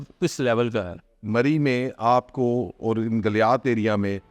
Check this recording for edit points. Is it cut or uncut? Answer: cut